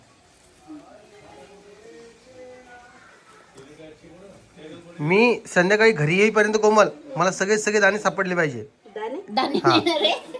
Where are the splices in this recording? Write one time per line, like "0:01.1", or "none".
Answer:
none

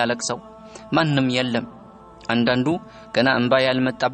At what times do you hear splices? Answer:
none

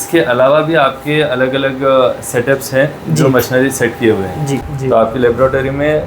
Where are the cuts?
0:04.7

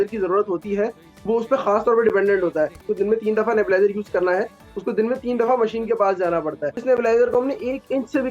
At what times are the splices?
0:02.8
0:06.7

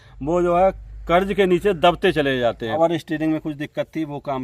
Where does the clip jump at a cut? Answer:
0:02.8

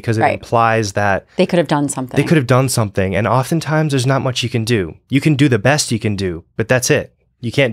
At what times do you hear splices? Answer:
none

